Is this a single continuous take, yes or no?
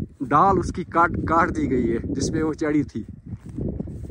yes